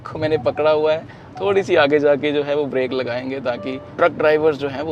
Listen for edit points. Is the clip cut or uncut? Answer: cut